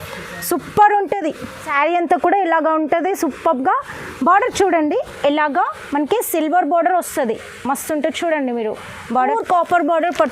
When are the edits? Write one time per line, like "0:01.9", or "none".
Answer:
0:01.6
0:09.3